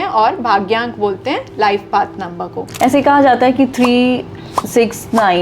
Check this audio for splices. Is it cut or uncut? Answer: cut